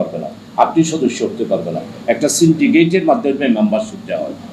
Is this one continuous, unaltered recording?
yes; 0 cuts

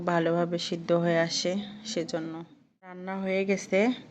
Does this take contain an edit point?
yes; 1 cut; at 3.1 s

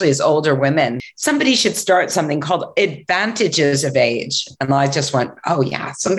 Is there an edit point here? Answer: yes; 1 cut; at 1.1 s

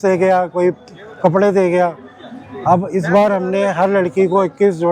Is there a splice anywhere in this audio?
no; 0 cuts

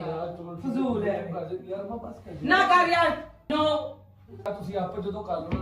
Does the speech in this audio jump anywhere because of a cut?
yes; 2 cuts; at 3.5 s, 4.5 s

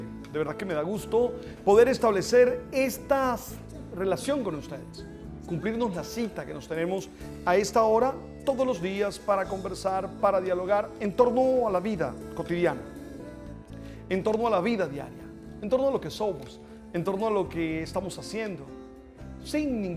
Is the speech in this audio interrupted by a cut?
no; 0 cuts

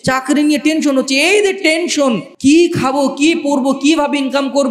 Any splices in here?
yes; 1 cut; at 2.3 s

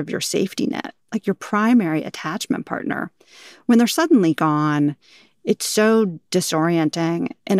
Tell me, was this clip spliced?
no; 0 cuts

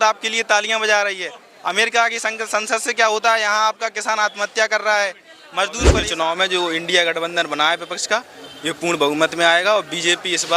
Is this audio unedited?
no; 1 cut; at 6.1 s

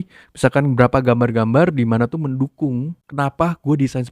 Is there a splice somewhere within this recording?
yes; 1 cut; at 3.0 s

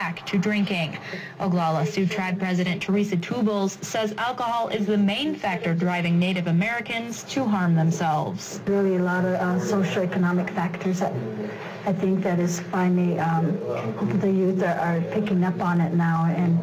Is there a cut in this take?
no; 0 cuts

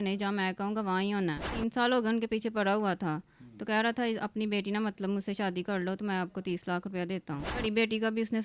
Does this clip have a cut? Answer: yes; 2 cuts; at 1.5 s, 7.6 s

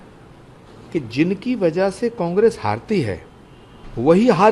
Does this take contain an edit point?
no; 0 cuts

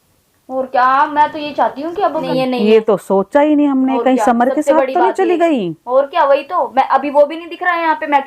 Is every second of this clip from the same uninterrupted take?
no; 1 cut; at 2.2 s

